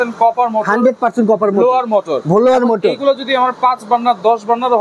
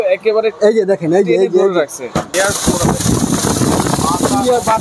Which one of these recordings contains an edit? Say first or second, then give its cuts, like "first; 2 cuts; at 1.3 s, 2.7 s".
second; 1 cut; at 2.3 s